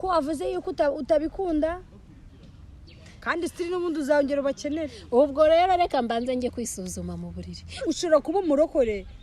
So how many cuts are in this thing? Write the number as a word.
one